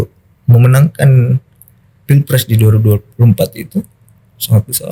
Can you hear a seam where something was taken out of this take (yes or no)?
no